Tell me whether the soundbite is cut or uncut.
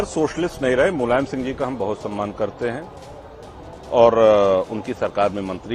uncut